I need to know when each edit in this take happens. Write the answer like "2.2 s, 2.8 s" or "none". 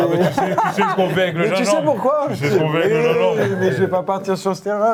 none